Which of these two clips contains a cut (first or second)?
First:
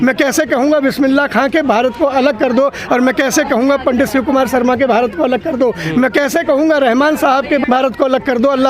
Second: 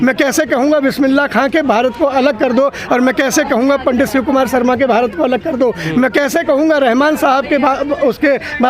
first